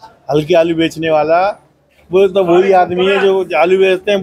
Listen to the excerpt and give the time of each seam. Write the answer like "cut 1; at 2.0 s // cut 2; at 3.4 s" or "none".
none